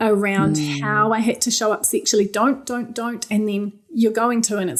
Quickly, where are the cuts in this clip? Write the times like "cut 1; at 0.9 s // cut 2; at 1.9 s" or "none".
none